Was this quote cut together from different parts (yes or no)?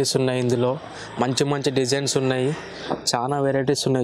no